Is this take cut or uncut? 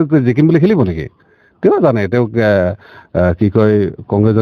uncut